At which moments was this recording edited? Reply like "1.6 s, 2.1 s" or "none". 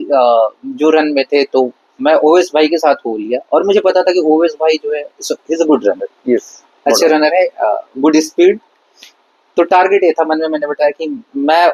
none